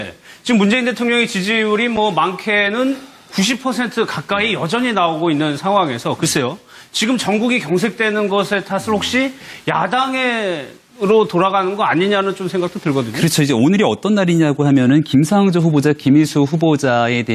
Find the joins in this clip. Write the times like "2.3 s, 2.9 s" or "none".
12.8 s